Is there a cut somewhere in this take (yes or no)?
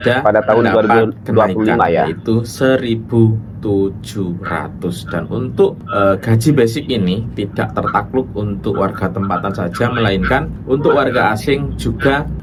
no